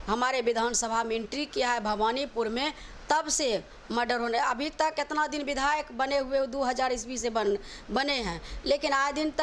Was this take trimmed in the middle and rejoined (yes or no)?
no